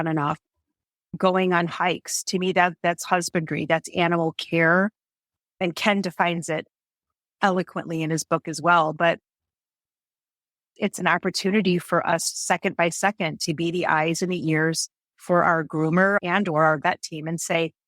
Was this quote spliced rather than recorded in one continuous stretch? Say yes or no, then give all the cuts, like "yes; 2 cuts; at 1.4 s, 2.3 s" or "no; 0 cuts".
yes; 2 cuts; at 7.3 s, 16.2 s